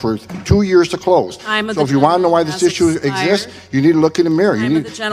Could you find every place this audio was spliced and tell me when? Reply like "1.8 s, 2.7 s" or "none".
none